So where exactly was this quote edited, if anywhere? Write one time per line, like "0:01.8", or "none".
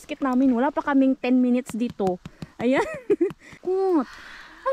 0:03.6